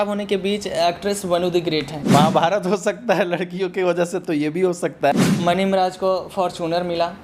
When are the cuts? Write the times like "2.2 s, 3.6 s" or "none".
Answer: 2.0 s, 5.1 s